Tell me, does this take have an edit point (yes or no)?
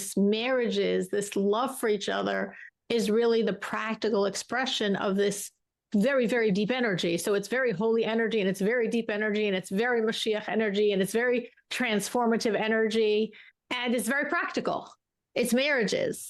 no